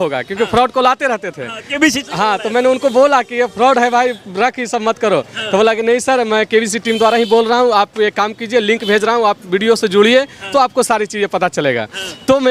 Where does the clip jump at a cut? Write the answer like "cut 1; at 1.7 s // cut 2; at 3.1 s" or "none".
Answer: none